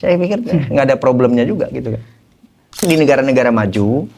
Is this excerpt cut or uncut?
cut